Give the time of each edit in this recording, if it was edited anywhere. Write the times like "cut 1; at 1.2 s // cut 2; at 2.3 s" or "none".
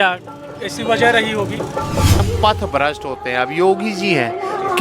cut 1; at 2.2 s